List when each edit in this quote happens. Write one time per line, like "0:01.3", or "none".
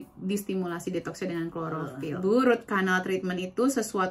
0:02.0

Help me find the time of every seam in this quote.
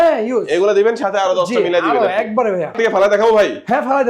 0:02.8

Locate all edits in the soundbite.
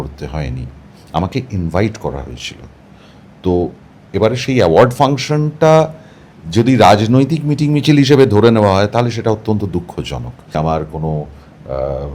0:10.5

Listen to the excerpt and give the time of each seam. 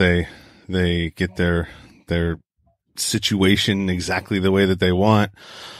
none

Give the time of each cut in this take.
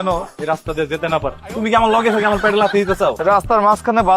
0:01.4
0:03.2

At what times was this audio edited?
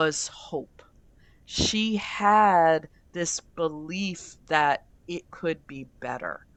none

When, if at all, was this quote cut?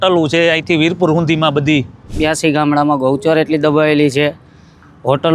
0:02.1

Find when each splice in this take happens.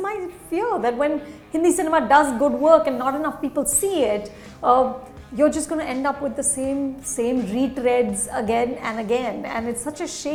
none

